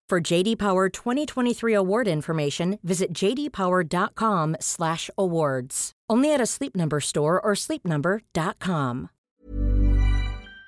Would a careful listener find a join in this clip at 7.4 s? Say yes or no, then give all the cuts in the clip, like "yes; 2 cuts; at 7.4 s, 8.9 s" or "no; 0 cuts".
no; 1 cut; at 9.3 s